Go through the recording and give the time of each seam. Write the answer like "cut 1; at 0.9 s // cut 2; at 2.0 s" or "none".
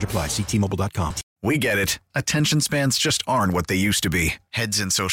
cut 1; at 1.2 s